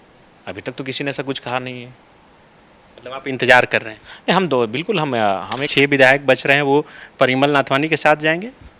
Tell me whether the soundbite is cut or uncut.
cut